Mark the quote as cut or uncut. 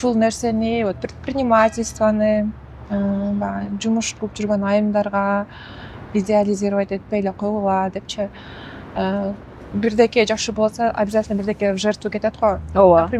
uncut